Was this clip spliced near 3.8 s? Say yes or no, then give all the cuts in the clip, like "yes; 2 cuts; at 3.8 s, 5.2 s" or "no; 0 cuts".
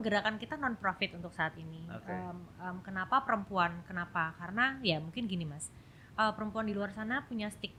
no; 0 cuts